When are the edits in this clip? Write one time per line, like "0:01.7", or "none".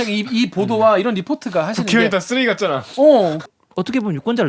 0:03.4